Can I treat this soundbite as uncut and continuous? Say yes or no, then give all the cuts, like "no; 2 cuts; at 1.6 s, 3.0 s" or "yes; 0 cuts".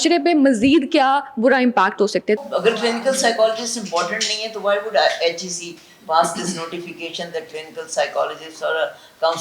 no; 1 cut; at 2.4 s